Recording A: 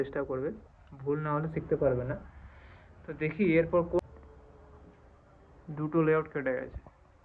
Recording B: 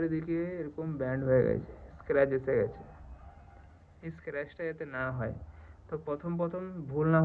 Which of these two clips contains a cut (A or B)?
A